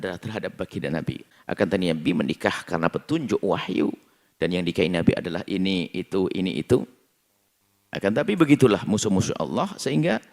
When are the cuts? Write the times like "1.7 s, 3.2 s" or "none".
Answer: 1.3 s